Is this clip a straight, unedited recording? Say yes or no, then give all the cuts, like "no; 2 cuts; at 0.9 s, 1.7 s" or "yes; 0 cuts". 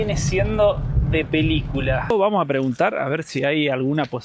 no; 1 cut; at 2.1 s